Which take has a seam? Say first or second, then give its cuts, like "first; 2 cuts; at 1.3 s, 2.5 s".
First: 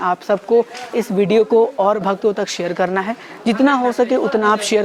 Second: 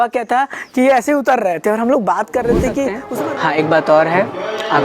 second; 1 cut; at 3.0 s